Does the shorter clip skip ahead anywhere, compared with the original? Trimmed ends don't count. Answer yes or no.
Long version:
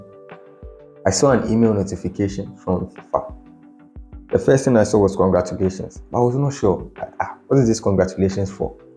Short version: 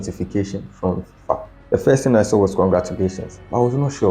yes